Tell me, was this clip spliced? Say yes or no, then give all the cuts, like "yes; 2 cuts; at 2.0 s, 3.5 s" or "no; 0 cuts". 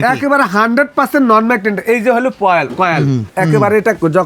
yes; 1 cut; at 3.3 s